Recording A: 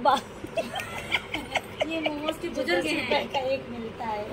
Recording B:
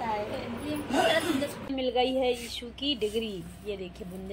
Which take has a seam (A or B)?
B